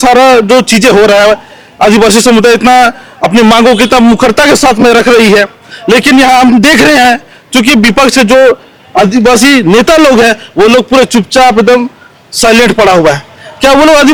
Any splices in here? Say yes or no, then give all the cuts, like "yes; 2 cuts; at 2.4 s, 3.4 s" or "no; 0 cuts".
no; 0 cuts